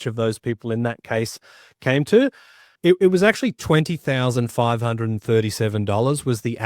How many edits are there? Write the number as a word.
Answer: one